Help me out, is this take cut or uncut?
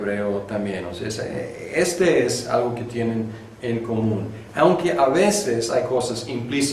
uncut